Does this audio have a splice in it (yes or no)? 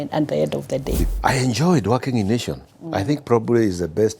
yes